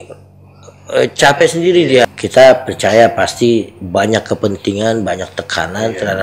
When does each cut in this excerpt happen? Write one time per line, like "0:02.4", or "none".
0:02.0